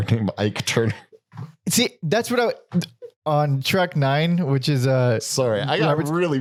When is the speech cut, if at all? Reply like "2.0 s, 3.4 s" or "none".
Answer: none

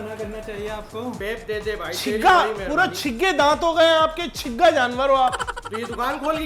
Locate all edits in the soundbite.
1.2 s

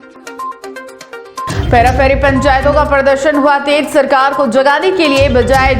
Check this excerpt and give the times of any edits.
1.5 s

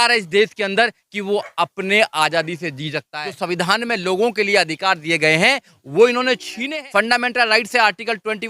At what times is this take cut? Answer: 3.0 s, 6.6 s

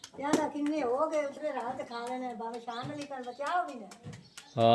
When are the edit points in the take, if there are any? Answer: none

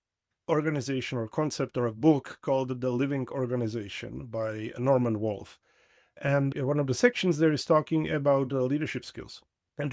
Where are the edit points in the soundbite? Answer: 4.7 s, 6.5 s

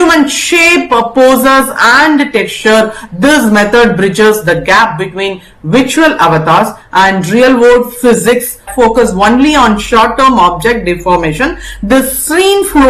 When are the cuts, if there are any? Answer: 8.7 s

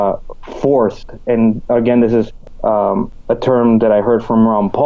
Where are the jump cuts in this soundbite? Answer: 2.8 s

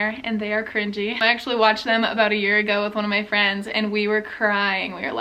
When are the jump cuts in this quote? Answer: 1.2 s

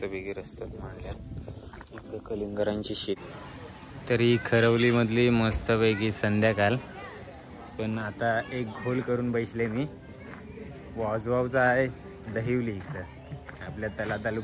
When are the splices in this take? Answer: 3.2 s

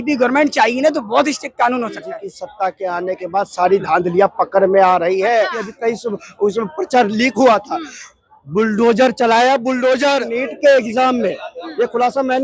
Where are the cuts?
2.0 s, 5.6 s, 10.4 s

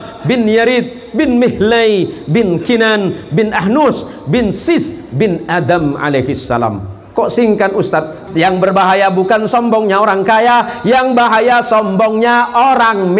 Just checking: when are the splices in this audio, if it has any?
8.2 s

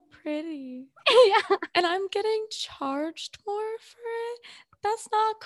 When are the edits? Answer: none

